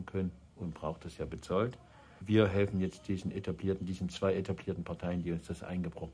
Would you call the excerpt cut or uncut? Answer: cut